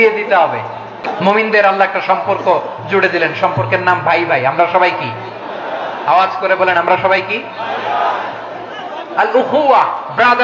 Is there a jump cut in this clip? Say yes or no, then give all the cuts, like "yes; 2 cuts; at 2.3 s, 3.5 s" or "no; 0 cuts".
yes; 1 cut; at 1.1 s